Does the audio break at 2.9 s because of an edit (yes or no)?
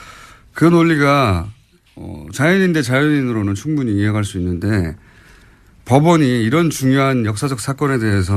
no